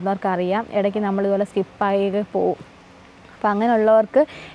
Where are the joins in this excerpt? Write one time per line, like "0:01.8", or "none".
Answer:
none